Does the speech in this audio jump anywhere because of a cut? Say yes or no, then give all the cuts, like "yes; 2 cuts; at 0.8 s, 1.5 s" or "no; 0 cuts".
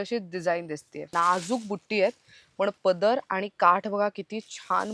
yes; 1 cut; at 1.1 s